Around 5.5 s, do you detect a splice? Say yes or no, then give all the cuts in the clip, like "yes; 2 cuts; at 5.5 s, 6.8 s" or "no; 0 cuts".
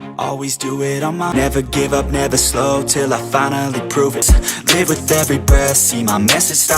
no; 2 cuts; at 1.3 s, 4.3 s